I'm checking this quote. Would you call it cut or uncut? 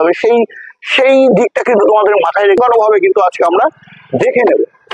cut